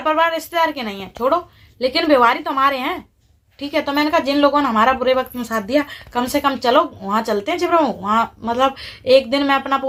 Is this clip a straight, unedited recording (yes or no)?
yes